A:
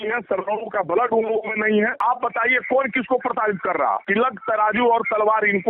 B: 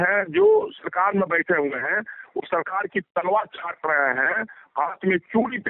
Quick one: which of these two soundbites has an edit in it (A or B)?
A